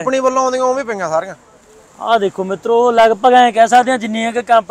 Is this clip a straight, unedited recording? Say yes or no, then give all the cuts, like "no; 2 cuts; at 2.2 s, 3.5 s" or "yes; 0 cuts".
yes; 0 cuts